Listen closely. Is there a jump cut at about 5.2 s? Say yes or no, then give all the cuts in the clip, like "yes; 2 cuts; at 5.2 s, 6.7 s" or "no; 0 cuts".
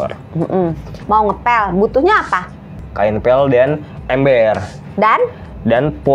no; 2 cuts; at 0.9 s, 2.8 s